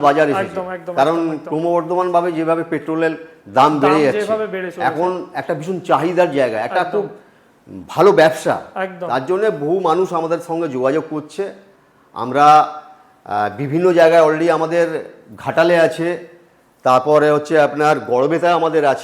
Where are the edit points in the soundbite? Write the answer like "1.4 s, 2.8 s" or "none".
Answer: none